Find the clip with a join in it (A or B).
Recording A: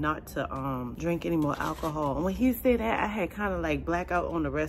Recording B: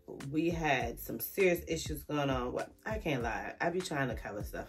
A